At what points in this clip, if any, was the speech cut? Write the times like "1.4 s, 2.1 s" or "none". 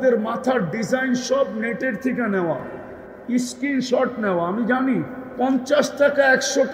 5.2 s